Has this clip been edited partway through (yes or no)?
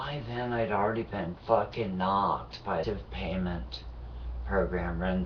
no